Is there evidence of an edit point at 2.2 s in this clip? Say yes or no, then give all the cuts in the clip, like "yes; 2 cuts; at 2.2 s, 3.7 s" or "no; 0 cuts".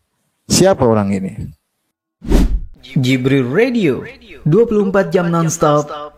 yes; 1 cut; at 2.2 s